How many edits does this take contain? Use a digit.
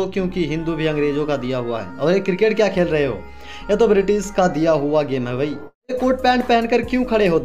1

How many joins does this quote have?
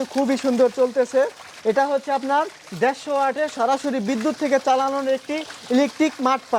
0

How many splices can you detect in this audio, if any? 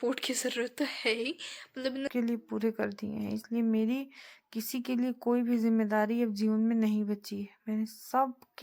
1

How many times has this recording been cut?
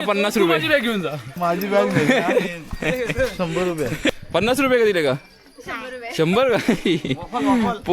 2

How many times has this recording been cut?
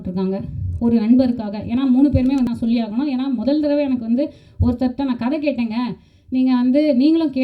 1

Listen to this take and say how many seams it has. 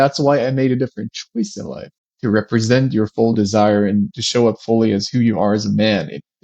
1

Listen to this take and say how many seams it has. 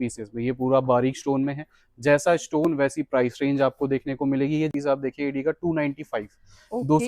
1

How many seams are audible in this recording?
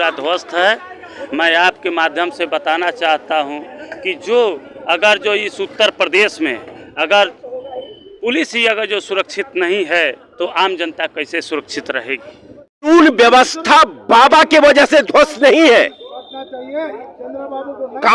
1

